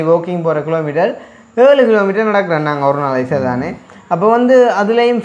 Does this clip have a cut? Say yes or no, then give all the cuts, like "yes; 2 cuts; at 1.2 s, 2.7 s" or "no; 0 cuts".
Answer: no; 0 cuts